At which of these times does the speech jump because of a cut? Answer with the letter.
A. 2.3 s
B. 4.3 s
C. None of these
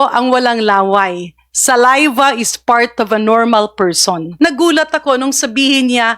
B